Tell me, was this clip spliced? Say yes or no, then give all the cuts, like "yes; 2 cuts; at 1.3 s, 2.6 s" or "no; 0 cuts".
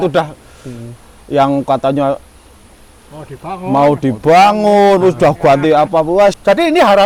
no; 0 cuts